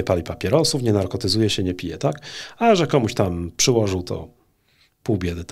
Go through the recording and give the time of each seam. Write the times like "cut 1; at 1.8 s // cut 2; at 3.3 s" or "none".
none